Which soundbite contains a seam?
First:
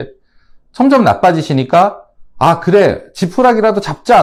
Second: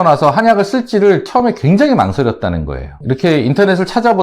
second; 1 cut; at 2.9 s

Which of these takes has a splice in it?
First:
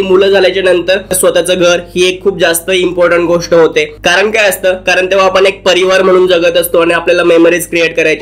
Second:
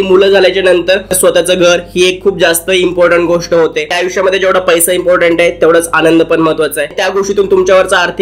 second; 2 cuts; at 4.0 s, 7.0 s

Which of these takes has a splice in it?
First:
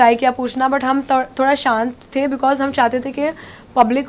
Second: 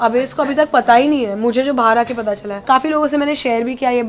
second; 1 cut; at 2.6 s

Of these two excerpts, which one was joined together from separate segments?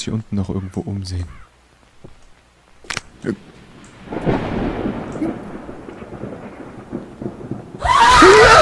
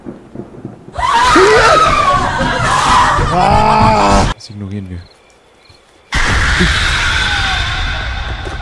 second; 1 cut; at 4.3 s

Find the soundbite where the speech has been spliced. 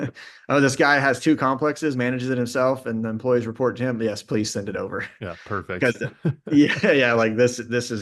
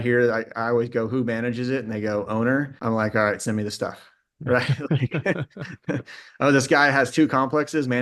second; 1 cut; at 2.7 s

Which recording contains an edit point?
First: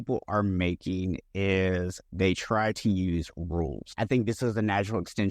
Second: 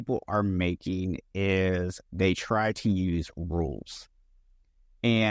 first; 1 cut; at 3.9 s

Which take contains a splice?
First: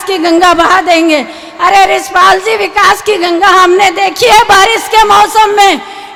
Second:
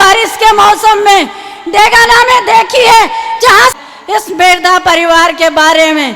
second; 1 cut; at 3.7 s

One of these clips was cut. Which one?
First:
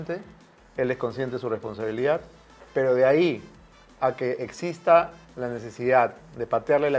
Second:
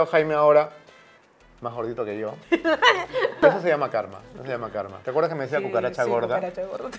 second; 1 cut; at 3.4 s

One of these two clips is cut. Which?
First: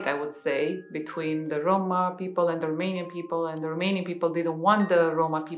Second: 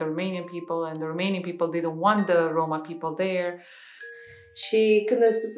second; 1 cut; at 4.1 s

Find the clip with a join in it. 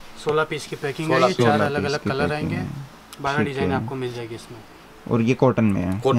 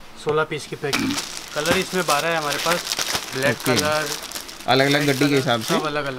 second; 1 cut; at 0.9 s

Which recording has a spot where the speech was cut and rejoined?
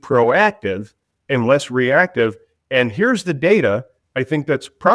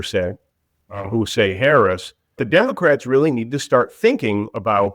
second; 1 cut; at 2.4 s

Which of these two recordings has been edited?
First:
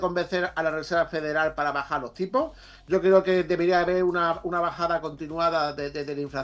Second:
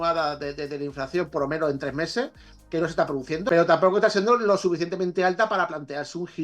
second; 1 cut; at 3.5 s

